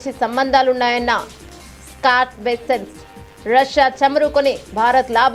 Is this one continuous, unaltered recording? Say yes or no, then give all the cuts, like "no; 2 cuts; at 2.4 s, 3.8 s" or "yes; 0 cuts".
yes; 0 cuts